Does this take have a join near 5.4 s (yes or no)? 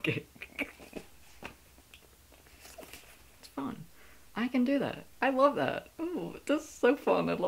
no